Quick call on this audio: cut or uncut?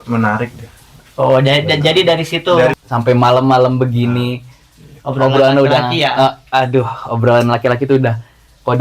cut